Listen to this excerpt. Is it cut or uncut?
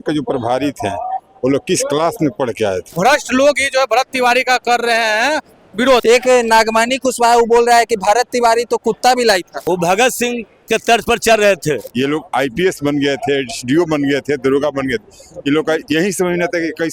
cut